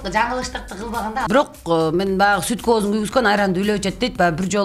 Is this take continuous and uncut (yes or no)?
no